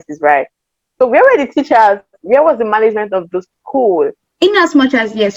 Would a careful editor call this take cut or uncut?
cut